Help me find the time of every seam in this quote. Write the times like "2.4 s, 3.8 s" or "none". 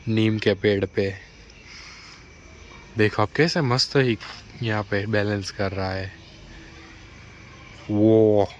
none